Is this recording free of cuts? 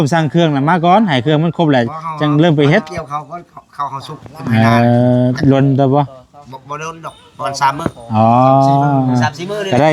yes; 0 cuts

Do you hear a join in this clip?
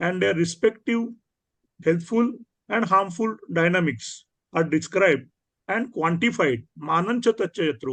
no; 0 cuts

